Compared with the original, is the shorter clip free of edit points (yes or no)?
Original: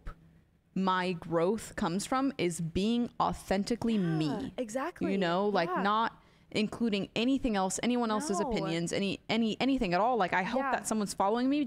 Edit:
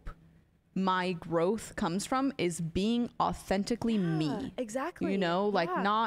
yes